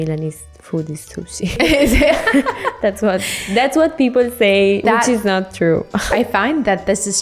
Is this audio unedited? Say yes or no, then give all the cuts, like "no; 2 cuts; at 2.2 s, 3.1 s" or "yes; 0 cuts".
no; 3 cuts; at 1.6 s, 4.8 s, 6.1 s